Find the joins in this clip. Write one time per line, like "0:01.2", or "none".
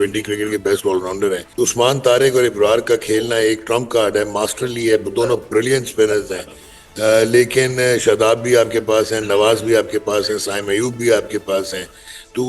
0:01.4